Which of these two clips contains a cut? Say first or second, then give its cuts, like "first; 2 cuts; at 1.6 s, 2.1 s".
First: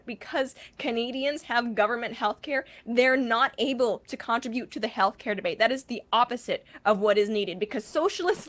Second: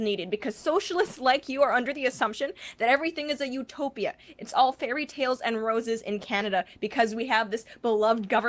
second; 2 cuts; at 6.7 s, 7.5 s